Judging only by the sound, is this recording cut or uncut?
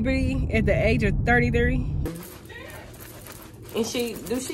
cut